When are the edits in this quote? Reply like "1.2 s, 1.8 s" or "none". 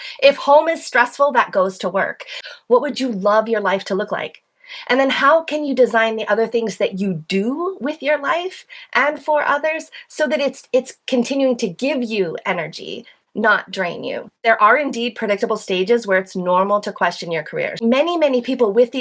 2.4 s, 14.4 s, 17.8 s